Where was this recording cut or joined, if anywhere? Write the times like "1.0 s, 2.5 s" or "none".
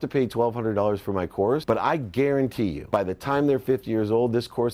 1.6 s, 2.8 s